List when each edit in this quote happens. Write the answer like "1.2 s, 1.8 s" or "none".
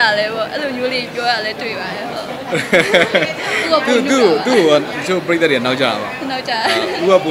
none